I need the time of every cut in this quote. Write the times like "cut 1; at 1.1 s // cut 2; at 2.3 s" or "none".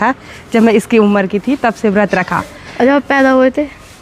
none